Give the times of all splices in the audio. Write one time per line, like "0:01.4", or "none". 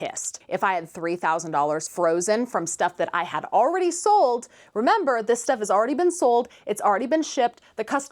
none